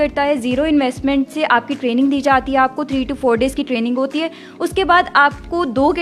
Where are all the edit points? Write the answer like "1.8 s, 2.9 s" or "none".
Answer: none